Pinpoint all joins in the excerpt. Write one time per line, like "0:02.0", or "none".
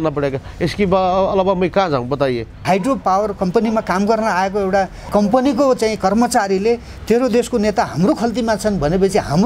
0:03.0